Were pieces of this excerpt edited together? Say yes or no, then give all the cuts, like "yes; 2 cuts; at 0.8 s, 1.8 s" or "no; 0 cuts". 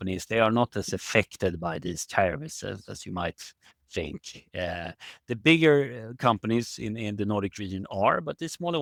no; 0 cuts